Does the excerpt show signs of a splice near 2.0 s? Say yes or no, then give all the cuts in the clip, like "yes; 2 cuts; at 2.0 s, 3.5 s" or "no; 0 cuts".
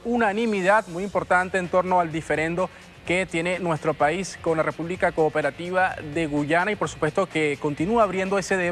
no; 1 cut; at 5.9 s